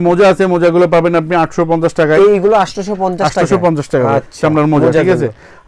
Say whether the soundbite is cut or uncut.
uncut